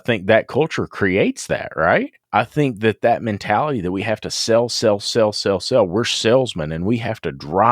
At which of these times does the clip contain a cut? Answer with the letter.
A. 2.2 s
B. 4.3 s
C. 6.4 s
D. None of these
A